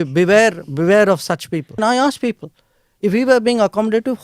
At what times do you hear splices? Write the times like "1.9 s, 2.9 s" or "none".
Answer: 1.8 s